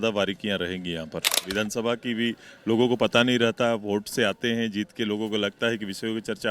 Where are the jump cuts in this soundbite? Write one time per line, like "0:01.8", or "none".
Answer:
0:01.4